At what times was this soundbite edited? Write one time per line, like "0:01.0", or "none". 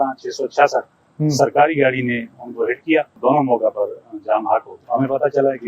0:03.2
0:04.8